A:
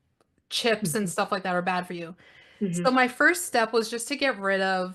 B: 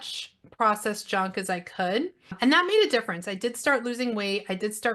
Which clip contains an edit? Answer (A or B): B